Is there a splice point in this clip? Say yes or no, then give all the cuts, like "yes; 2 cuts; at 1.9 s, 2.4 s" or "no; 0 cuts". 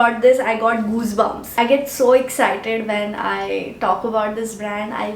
no; 0 cuts